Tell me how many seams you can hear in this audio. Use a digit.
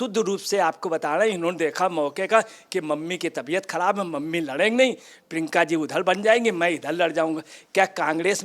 0